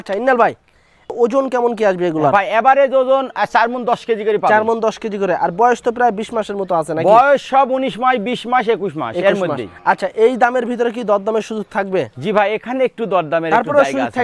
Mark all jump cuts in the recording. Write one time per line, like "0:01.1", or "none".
0:01.1